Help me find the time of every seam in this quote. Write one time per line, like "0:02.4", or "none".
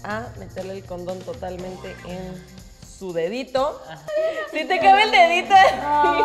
none